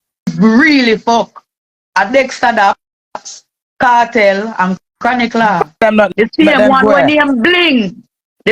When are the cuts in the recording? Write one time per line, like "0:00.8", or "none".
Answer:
0:05.8